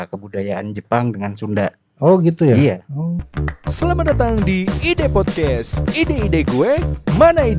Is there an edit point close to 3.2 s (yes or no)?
yes